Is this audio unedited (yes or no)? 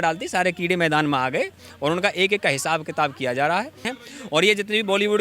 no